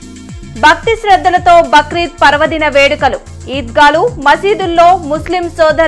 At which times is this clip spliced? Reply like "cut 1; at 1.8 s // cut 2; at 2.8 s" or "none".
none